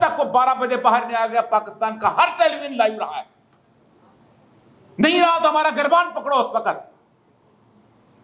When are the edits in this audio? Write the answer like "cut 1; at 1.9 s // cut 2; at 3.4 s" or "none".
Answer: none